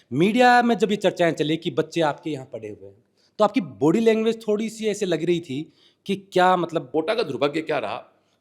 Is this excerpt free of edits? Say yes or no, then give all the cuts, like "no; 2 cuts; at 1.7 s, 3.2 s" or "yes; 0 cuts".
no; 1 cut; at 6.9 s